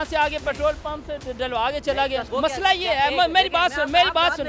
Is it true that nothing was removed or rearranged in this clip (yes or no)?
no